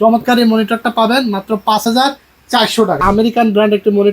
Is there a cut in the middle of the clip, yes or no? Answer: yes